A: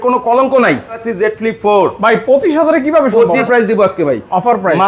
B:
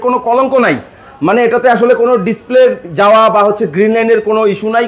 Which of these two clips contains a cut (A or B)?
A